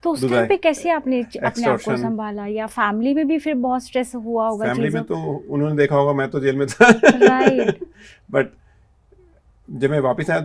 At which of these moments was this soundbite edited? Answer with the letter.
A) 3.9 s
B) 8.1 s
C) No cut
C